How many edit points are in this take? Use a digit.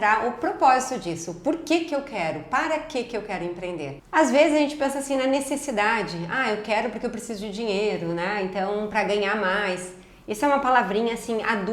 1